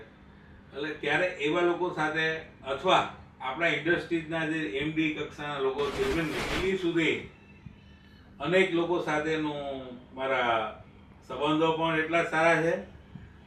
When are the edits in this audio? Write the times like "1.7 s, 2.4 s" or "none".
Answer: 6.5 s